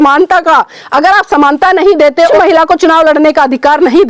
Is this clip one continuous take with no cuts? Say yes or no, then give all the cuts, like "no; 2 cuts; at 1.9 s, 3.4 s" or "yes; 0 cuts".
no; 1 cut; at 2.3 s